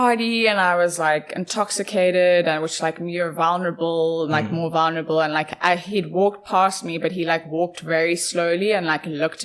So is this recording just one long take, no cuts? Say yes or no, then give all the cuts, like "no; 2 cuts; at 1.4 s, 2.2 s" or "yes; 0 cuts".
yes; 0 cuts